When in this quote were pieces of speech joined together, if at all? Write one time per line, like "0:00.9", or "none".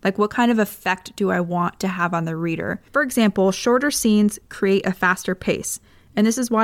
0:02.9